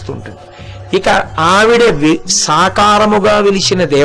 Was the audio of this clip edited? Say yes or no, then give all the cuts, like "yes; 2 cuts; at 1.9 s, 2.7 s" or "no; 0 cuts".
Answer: no; 0 cuts